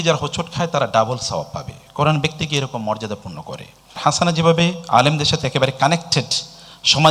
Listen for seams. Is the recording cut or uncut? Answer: cut